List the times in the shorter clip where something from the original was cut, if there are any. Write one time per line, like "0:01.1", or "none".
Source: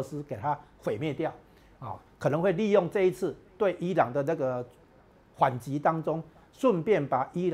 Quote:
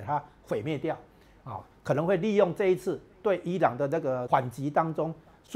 0:04.2